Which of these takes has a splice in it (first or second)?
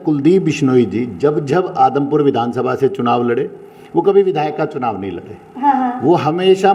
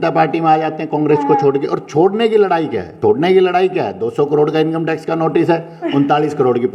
second